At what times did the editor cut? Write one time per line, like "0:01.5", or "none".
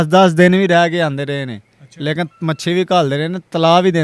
none